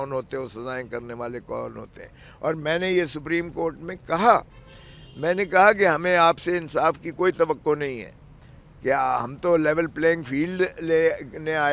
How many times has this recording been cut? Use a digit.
0